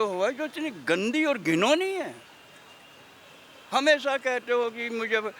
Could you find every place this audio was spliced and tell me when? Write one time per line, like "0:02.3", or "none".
none